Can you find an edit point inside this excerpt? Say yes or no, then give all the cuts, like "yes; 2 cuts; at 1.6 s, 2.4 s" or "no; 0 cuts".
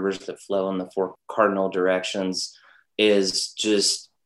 yes; 1 cut; at 1.1 s